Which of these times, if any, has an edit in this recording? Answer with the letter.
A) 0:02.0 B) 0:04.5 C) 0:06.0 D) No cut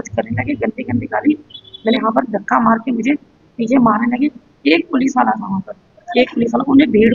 A